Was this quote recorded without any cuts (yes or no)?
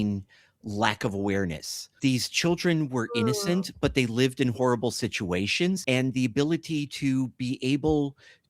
no